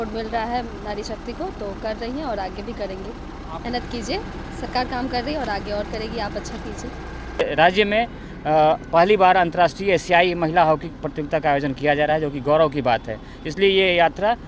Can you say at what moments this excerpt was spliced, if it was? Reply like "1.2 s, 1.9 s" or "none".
3.6 s, 7.4 s